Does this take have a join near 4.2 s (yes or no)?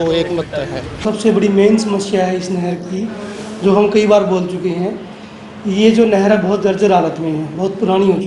no